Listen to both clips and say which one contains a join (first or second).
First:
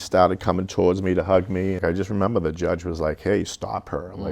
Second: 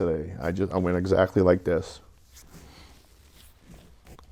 first